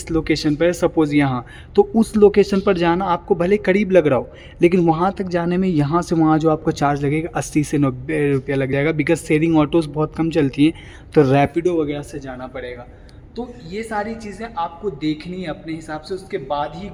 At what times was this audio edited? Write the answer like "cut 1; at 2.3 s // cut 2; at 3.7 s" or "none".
none